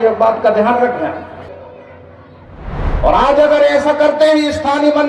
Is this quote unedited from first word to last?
no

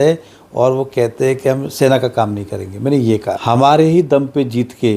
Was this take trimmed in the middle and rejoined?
yes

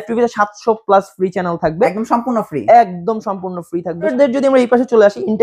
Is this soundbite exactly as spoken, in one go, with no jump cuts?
no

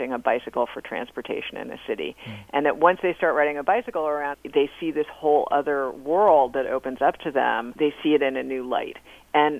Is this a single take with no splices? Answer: no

